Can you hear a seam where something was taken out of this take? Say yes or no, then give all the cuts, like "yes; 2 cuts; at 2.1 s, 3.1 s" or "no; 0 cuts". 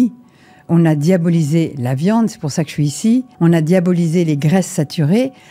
yes; 1 cut; at 3.3 s